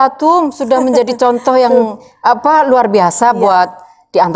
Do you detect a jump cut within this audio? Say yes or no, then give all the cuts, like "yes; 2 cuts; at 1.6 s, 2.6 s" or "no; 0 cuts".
no; 0 cuts